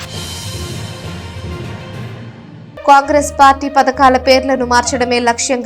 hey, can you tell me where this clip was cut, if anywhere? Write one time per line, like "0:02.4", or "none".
none